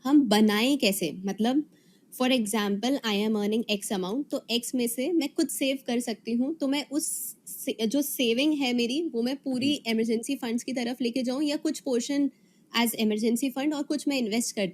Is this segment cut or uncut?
uncut